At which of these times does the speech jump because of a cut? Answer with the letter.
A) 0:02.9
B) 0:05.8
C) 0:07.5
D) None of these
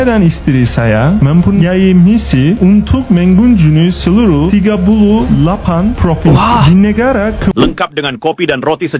C